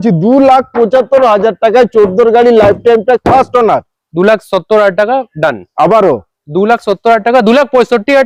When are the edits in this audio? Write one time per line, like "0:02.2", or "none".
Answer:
none